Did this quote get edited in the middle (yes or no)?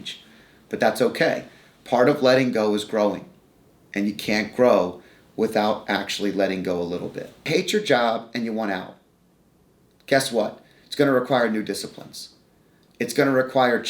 yes